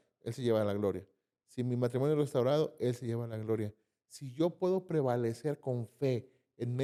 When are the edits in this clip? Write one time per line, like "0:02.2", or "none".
none